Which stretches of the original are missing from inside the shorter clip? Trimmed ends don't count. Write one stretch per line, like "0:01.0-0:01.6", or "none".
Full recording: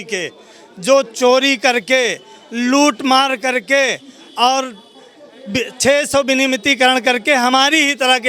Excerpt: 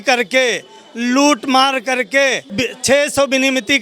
0:04.0-0:05.4